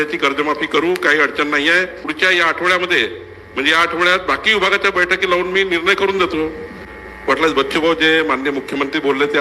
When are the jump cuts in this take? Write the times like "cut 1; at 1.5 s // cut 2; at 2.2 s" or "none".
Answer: cut 1; at 2.0 s // cut 2; at 7.0 s